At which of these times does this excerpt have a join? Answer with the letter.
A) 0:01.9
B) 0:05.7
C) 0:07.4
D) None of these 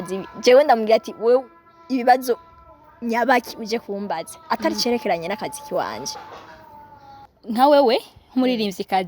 C